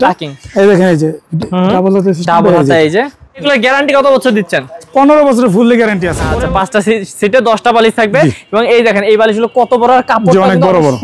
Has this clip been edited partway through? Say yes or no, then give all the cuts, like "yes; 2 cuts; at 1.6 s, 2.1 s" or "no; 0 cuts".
yes; 2 cuts; at 3.4 s, 6.2 s